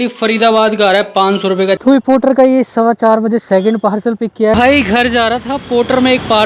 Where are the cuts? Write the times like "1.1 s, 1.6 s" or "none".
1.8 s, 4.5 s